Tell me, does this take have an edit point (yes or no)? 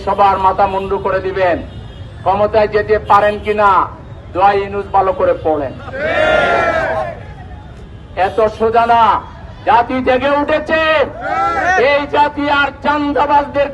no